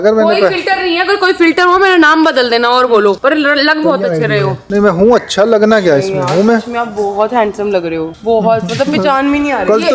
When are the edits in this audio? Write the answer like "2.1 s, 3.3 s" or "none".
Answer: none